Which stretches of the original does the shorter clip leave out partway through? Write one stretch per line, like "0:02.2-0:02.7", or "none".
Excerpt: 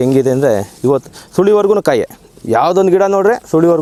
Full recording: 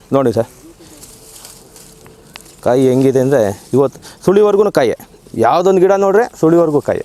none